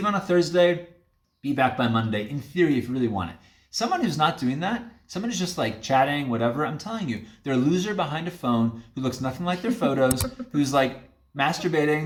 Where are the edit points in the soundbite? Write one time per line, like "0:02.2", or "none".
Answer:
none